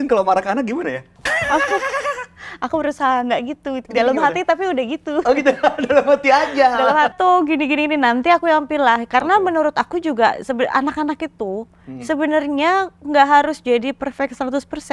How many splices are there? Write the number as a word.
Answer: two